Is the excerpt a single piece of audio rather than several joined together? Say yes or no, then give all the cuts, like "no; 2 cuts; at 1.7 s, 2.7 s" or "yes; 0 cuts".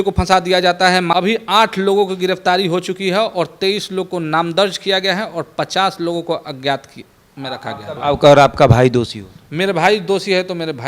no; 2 cuts; at 1.1 s, 8.0 s